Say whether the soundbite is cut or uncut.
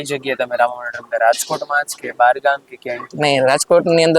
uncut